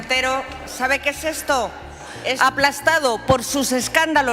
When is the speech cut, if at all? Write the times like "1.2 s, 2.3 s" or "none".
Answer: 2.4 s